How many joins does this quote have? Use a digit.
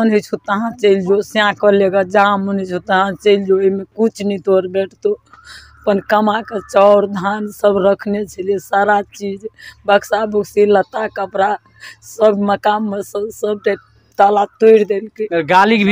0